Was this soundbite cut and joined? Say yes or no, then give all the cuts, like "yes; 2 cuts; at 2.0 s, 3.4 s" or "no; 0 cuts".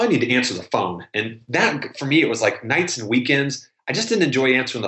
no; 0 cuts